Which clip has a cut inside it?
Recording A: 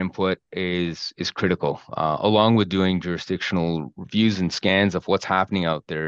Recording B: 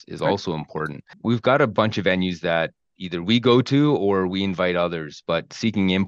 B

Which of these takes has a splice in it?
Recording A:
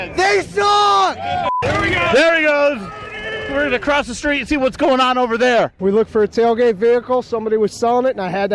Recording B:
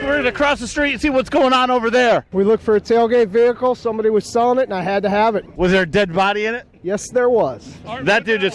A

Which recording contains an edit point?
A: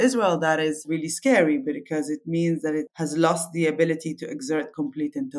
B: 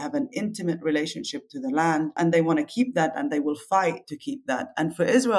B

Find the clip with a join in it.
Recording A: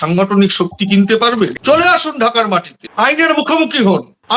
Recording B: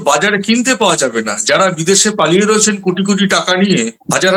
A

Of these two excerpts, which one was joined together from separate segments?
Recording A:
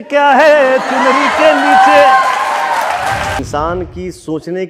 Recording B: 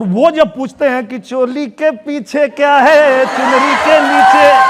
A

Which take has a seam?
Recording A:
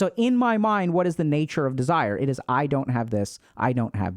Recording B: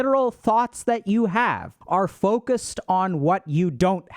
B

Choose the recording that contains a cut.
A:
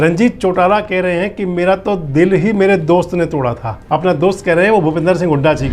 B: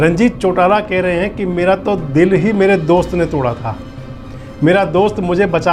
A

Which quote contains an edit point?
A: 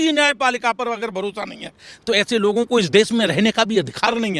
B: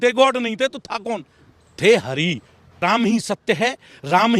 B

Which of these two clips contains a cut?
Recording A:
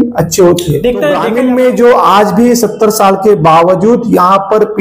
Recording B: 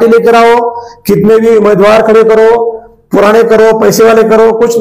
A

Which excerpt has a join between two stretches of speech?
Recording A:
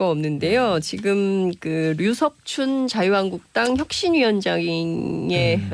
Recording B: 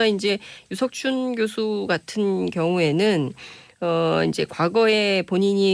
B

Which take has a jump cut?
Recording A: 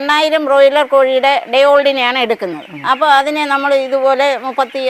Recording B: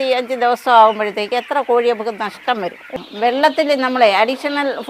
B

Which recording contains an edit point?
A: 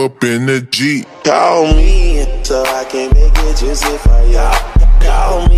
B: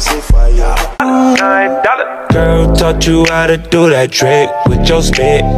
B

